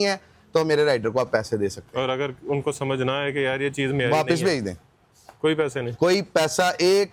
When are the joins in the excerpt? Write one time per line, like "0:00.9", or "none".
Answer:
none